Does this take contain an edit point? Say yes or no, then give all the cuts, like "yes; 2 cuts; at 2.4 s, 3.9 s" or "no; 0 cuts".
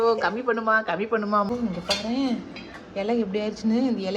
yes; 1 cut; at 1.5 s